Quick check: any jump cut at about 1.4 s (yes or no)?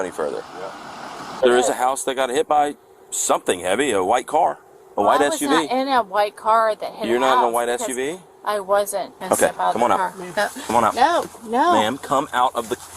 yes